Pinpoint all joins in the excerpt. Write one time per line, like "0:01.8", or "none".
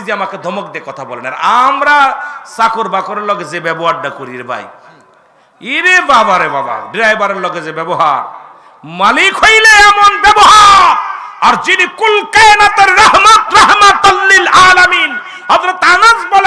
none